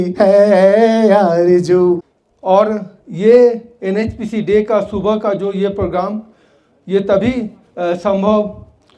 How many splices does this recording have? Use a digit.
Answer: 1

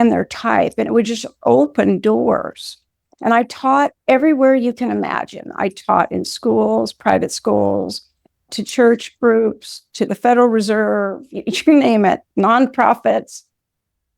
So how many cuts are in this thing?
1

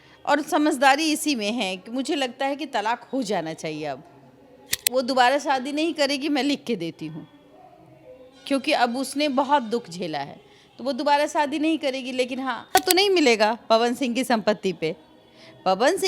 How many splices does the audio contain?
2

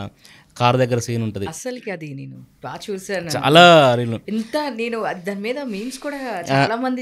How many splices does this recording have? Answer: 0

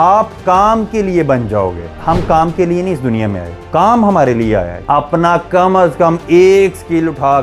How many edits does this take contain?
3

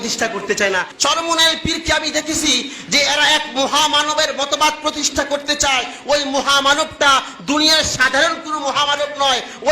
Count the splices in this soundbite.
1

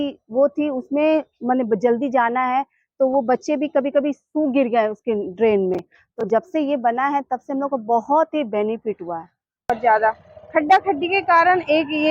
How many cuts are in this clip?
1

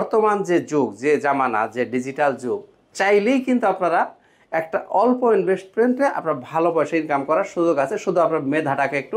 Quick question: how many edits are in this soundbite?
0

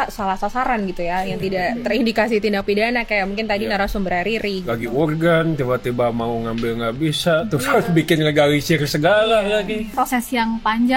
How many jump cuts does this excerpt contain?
1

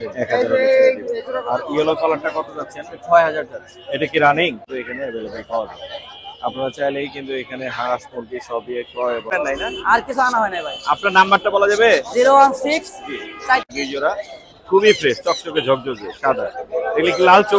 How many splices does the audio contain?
3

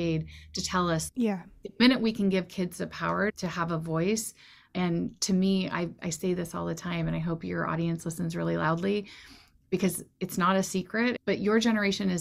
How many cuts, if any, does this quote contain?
3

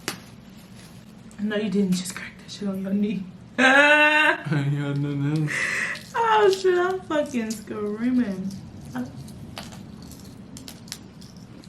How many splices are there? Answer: 0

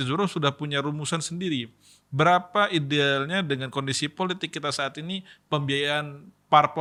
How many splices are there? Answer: 0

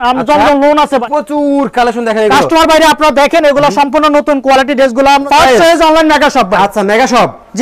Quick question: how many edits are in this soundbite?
2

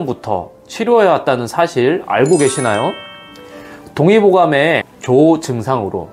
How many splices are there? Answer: 1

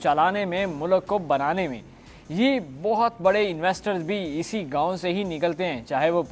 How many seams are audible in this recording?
0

